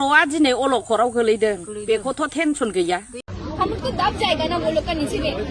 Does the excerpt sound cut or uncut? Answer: cut